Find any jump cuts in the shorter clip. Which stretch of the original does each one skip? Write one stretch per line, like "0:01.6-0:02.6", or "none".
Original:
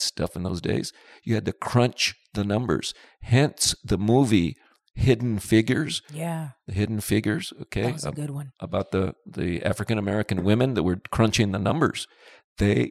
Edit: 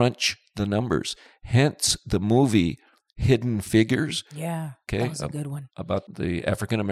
0:06.5-0:07.6
0:08.9-0:09.2